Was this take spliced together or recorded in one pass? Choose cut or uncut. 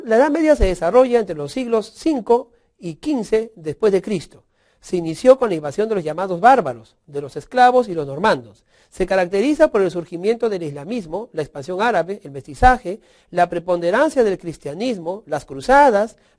cut